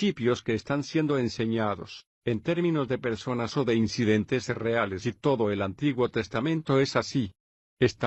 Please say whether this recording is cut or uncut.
uncut